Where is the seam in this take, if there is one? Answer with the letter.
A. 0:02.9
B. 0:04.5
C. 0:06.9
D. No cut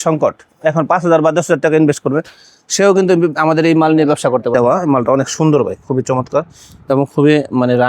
B